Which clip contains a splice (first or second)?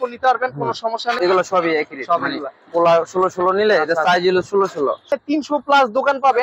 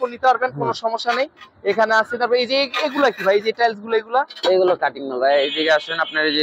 first